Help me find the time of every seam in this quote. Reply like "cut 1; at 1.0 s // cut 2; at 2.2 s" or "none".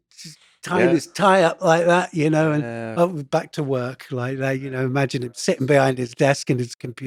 none